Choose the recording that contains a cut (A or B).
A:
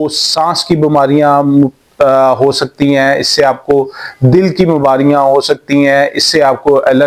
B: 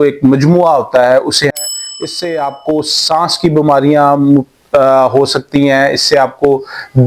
B